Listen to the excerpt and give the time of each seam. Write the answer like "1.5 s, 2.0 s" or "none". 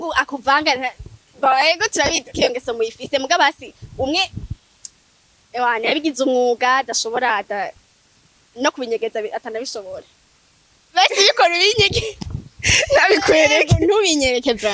none